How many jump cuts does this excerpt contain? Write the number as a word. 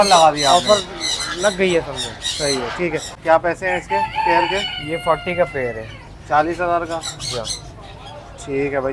one